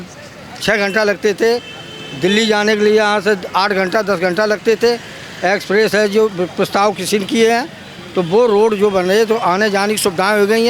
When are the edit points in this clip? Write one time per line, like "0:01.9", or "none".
none